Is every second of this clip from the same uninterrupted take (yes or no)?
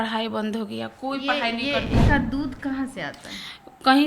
no